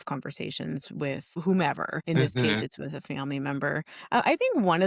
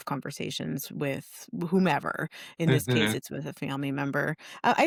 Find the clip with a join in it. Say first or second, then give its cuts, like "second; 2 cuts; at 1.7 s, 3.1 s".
first; 2 cuts; at 1.4 s, 1.9 s